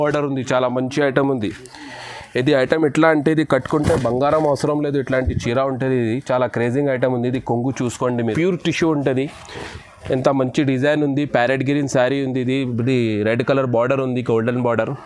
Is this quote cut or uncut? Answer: cut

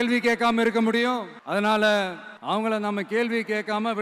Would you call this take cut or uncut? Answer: cut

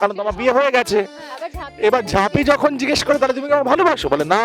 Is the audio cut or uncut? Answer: uncut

